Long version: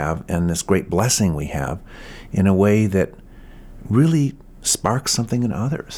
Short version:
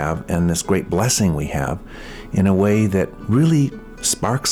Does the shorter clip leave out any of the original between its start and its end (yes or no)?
yes